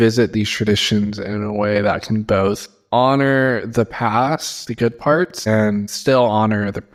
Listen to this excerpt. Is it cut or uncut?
uncut